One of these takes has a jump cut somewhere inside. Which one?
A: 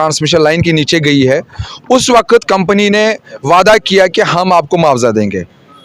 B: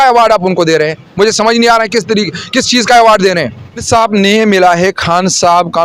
B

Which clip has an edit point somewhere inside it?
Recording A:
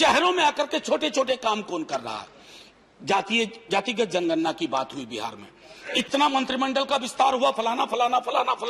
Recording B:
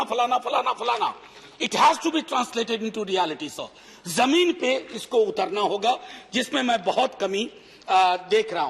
A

